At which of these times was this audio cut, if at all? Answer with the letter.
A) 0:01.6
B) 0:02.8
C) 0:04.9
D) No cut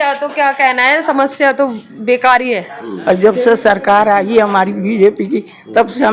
B